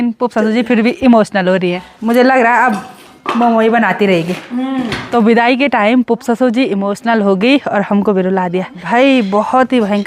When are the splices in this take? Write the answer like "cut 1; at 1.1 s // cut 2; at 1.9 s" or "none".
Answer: cut 1; at 1.9 s // cut 2; at 5.0 s // cut 3; at 8.8 s